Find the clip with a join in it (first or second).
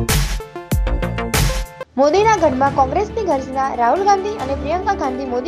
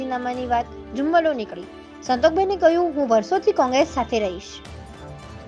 first